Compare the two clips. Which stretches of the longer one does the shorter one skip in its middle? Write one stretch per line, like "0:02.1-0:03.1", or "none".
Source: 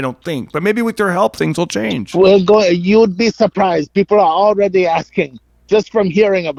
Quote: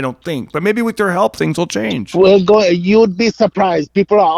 none